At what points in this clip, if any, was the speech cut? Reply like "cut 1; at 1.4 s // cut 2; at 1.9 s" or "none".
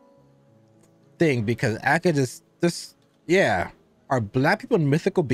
cut 1; at 4.0 s